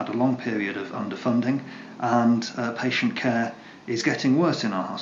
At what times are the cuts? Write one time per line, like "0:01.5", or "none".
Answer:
none